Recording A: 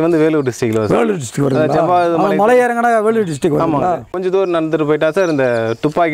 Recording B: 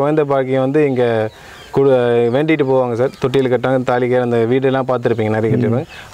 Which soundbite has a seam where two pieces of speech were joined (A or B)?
A